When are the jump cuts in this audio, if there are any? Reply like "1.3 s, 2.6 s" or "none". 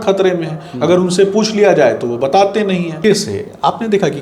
2.9 s